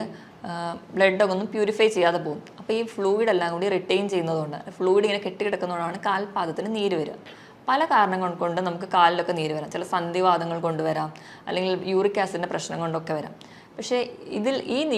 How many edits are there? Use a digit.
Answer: 0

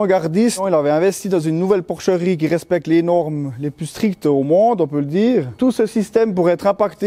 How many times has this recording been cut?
1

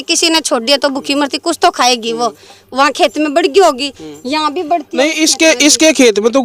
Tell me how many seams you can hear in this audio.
0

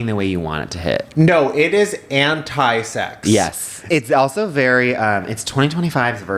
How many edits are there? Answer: 1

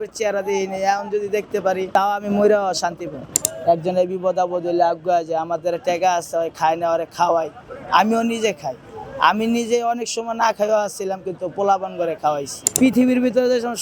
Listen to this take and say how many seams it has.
3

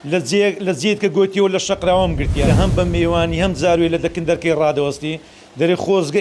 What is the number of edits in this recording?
1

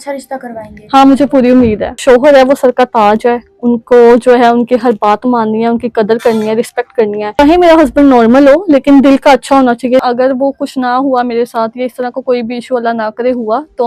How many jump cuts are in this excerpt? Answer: 3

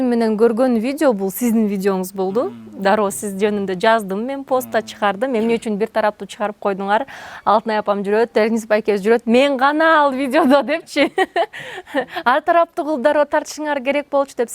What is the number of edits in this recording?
0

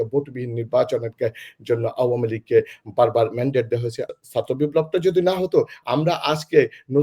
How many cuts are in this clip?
1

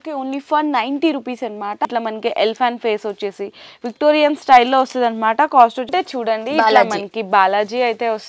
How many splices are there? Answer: 2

